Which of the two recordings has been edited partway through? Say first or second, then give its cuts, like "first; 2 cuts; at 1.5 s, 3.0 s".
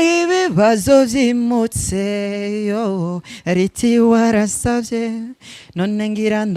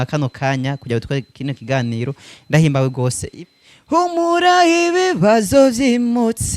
second; 1 cut; at 3.3 s